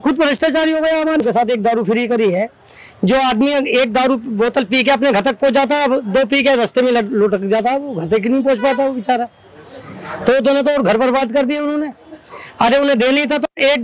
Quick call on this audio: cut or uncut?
cut